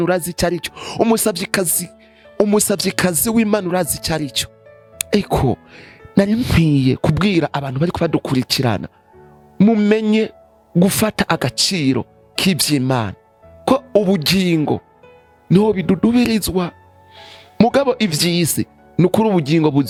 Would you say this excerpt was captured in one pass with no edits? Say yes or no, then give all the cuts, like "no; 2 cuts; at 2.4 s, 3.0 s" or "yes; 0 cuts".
yes; 0 cuts